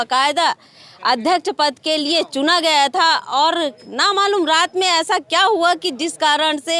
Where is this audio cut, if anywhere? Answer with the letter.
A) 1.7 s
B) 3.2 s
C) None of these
C